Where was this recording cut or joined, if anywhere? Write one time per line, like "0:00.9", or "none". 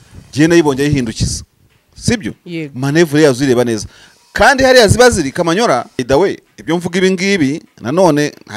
0:06.0

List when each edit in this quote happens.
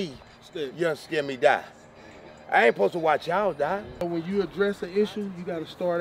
0:04.1

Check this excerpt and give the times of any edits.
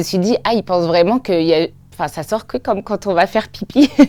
none

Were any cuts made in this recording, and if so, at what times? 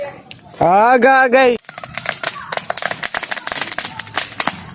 0:01.5

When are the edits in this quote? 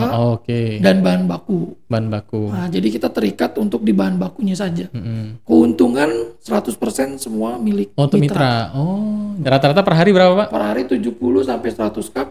0:09.3

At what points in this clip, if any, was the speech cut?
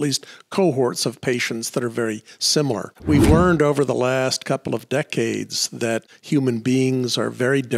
0:02.9
0:06.1

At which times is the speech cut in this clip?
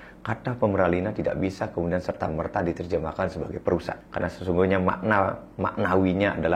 0:04.0

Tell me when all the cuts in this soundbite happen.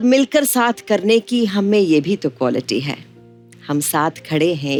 none

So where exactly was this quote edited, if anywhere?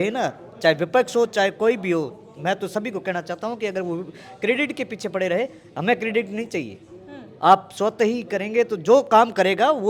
none

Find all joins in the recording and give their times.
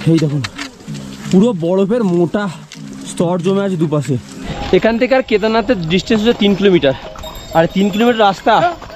0:04.6

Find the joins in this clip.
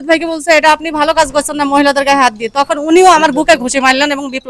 none

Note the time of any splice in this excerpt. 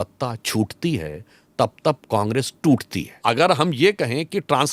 0:03.2

